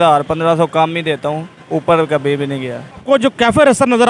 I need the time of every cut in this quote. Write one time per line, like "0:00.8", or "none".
0:03.0